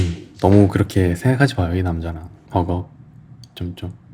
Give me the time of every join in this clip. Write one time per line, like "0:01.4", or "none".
0:02.3